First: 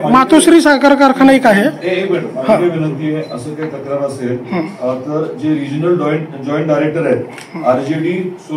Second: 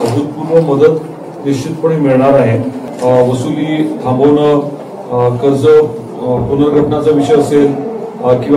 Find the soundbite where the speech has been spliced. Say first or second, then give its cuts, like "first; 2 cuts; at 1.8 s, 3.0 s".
second; 1 cut; at 2.8 s